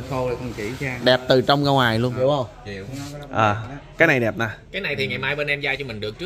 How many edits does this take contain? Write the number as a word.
one